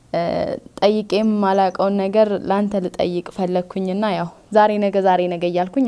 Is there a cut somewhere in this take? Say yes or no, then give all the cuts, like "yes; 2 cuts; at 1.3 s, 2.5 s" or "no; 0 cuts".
no; 0 cuts